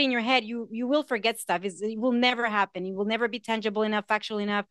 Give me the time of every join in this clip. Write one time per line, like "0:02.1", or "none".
none